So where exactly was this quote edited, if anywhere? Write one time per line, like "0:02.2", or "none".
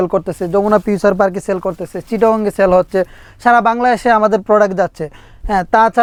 none